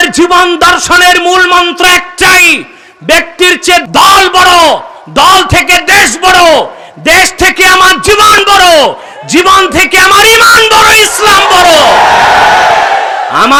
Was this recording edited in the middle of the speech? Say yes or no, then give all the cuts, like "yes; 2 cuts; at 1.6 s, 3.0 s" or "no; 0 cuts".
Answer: no; 0 cuts